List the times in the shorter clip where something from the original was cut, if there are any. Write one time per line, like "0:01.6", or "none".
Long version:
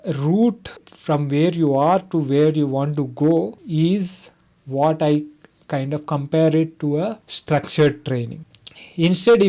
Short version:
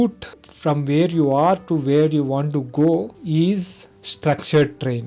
0:04.0